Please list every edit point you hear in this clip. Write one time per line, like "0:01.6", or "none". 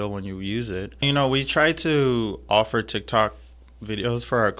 0:01.0

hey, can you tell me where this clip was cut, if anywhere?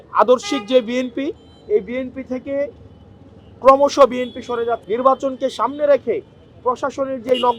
0:04.8

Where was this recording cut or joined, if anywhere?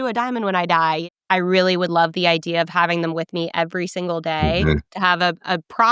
0:01.0

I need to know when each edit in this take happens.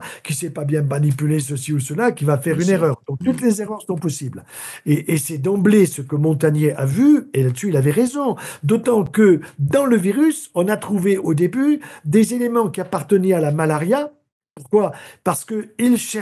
none

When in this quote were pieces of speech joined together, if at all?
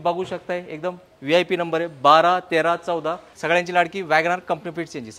0:03.3

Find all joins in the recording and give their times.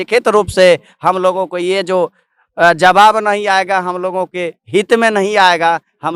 none

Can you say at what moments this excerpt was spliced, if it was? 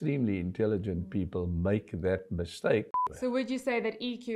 0:03.0

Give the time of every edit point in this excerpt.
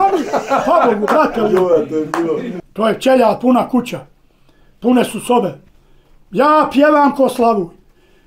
0:02.6

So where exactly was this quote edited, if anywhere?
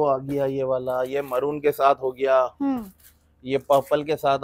none

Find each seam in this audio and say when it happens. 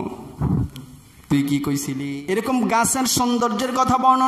0:02.0

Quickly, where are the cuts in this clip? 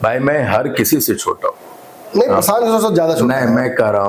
none

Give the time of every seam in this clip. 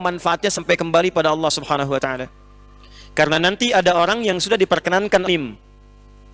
0:05.3

